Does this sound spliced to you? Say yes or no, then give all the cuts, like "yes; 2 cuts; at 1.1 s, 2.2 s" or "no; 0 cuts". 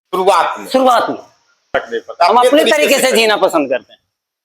yes; 1 cut; at 1.8 s